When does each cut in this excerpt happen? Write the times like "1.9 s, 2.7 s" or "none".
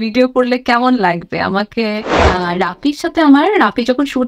2.2 s

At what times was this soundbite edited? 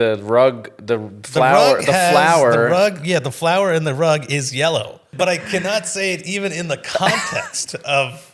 5.0 s

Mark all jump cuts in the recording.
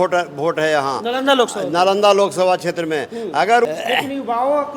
3.7 s

